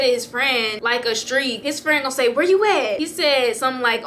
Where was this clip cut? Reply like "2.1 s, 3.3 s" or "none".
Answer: 1.6 s